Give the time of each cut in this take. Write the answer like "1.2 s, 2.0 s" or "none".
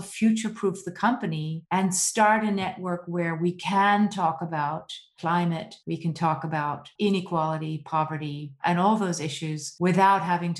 5.0 s